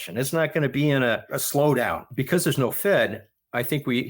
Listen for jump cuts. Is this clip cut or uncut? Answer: cut